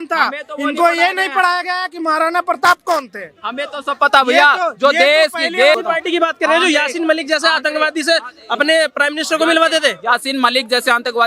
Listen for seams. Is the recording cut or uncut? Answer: cut